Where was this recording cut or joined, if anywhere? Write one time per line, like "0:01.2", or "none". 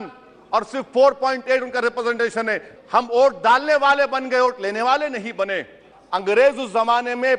0:02.7
0:05.9